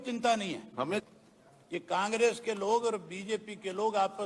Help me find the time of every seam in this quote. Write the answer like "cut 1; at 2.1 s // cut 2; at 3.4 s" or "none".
cut 1; at 1.0 s